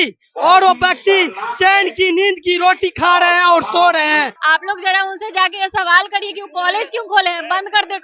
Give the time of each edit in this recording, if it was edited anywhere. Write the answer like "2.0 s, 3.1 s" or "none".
4.3 s